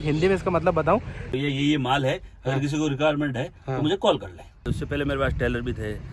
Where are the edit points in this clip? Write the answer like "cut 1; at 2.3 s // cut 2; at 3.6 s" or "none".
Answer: cut 1; at 1.2 s // cut 2; at 4.7 s